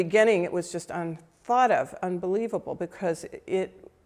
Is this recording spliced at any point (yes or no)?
no